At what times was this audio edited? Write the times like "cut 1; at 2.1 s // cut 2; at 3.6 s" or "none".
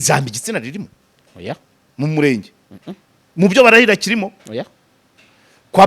none